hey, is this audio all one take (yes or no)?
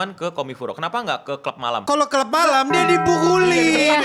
no